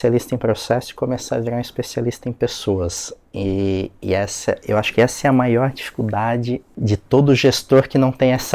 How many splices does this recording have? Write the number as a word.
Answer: one